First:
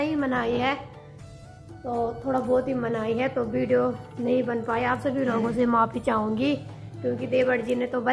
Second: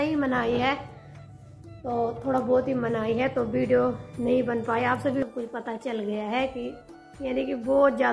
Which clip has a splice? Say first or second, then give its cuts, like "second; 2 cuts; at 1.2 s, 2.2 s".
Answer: second; 1 cut; at 5.2 s